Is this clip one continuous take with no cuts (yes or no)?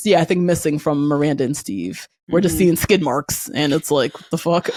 yes